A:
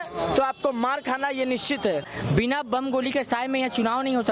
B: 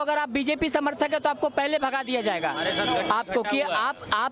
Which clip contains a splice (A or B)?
A